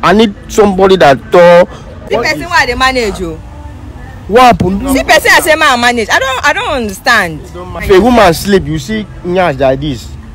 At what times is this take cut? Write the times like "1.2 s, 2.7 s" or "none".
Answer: 2.0 s, 7.8 s